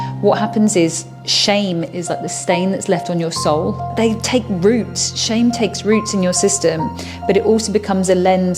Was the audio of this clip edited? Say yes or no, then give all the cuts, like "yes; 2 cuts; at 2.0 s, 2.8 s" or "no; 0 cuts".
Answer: yes; 1 cut; at 3.9 s